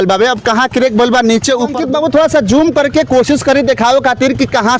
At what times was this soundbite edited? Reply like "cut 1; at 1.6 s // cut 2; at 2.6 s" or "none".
cut 1; at 1.8 s